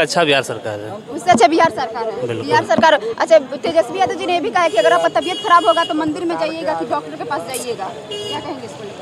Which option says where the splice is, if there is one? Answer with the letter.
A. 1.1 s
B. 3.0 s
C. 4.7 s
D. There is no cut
D